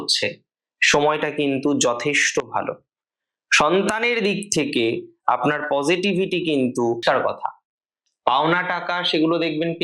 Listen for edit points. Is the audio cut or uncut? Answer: cut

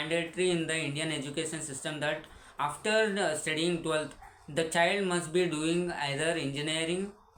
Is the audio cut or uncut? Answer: uncut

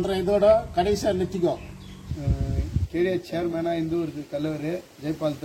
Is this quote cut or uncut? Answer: cut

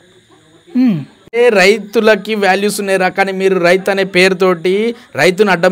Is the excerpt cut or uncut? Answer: cut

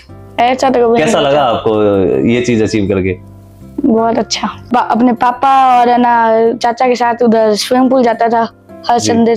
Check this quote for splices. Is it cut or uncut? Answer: cut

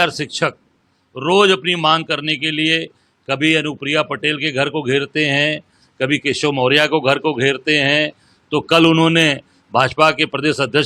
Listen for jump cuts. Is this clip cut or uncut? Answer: uncut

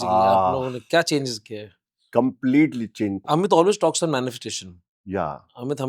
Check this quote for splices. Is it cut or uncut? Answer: cut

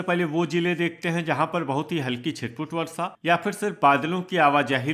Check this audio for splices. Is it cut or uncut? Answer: uncut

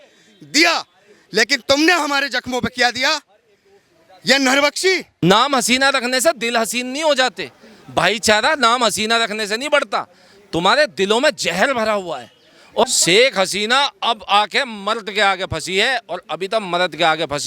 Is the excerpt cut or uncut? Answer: cut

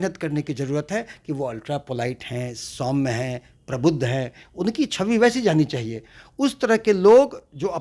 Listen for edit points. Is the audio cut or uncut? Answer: uncut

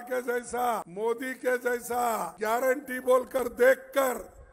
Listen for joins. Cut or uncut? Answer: cut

